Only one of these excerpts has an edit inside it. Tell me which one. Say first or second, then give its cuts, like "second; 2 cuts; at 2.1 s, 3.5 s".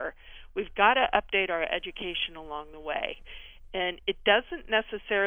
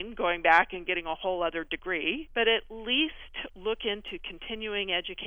second; 1 cut; at 2.2 s